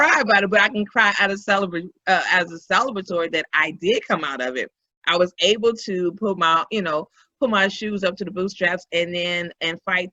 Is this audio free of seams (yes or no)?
yes